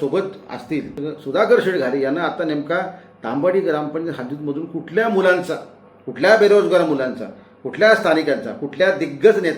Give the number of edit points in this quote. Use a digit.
1